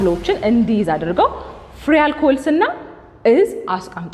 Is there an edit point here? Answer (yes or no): no